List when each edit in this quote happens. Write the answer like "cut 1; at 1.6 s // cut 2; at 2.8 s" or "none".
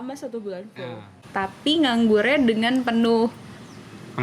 cut 1; at 1.2 s